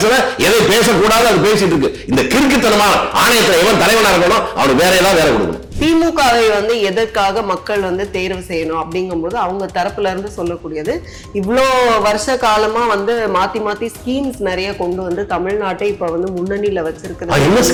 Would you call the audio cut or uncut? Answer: uncut